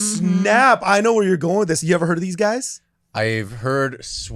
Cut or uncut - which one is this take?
uncut